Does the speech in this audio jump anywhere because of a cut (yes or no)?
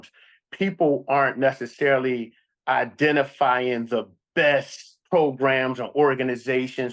no